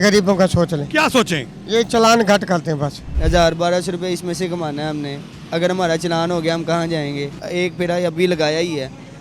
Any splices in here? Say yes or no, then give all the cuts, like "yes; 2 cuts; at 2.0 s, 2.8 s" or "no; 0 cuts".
yes; 2 cuts; at 3.1 s, 7.4 s